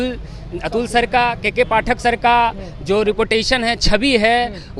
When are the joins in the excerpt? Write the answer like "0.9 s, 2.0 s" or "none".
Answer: none